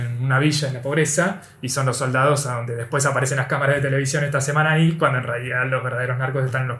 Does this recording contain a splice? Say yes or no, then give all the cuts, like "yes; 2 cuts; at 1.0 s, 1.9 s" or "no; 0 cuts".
no; 0 cuts